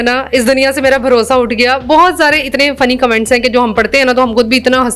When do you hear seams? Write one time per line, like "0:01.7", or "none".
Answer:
none